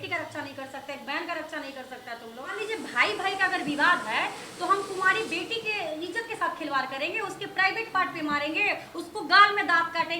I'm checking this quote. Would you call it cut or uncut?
cut